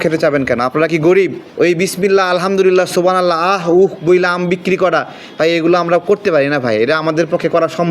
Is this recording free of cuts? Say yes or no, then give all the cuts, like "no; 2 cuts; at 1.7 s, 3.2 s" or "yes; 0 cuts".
no; 1 cut; at 1.4 s